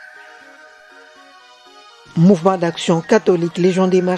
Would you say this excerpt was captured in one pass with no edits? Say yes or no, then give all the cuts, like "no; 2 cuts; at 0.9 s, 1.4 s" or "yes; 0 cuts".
no; 1 cut; at 1.5 s